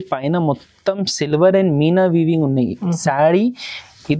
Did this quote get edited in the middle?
no; 0 cuts

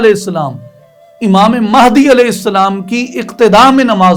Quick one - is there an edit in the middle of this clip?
no; 0 cuts

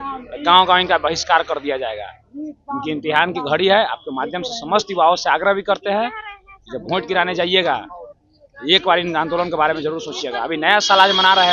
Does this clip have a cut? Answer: no; 0 cuts

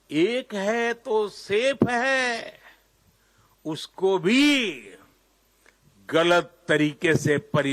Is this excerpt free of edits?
yes; 0 cuts

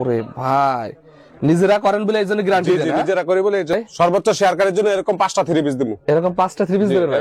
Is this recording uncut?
no; 1 cut; at 3.7 s

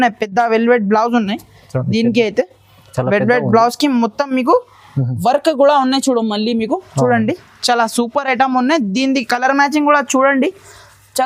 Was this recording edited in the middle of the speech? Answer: no; 0 cuts

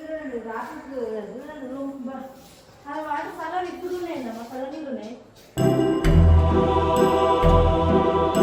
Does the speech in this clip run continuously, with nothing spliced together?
yes; 0 cuts

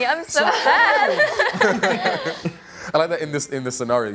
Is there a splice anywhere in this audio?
no; 0 cuts

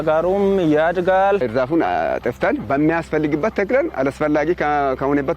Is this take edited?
yes; 1 cut; at 1.5 s

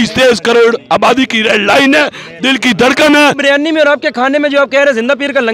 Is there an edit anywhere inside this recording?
yes; 1 cut; at 3.4 s

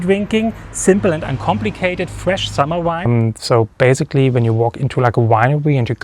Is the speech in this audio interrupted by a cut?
yes; 1 cut; at 3.1 s

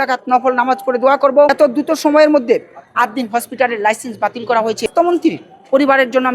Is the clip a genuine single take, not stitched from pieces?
no; 2 cuts; at 1.5 s, 4.9 s

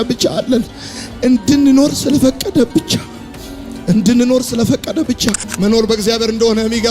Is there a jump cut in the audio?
yes; 1 cut; at 5.5 s

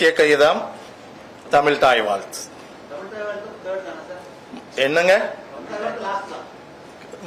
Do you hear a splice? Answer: no; 0 cuts

